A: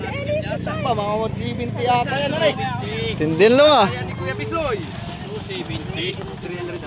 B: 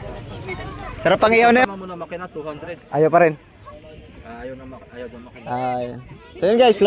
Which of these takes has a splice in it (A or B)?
B